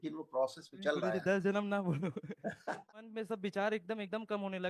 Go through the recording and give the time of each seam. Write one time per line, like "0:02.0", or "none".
0:02.9

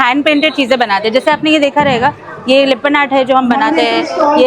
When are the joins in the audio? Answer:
none

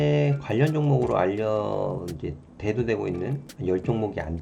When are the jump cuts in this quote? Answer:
0:03.5

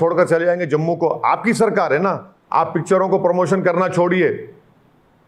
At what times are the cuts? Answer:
0:02.3

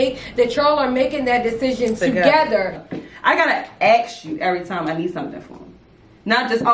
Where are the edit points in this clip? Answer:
0:02.8

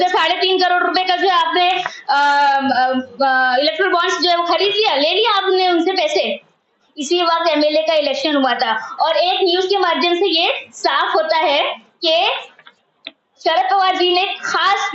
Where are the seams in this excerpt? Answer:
0:06.8

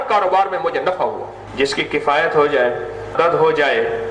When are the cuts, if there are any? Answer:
0:01.8
0:03.1

